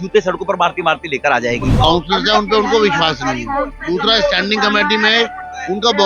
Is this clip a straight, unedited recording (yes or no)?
no